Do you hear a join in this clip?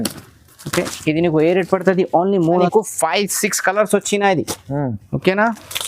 yes; 1 cut; at 2.7 s

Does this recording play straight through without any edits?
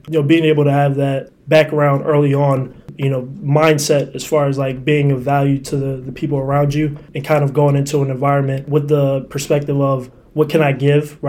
no; 2 cuts; at 2.9 s, 8.6 s

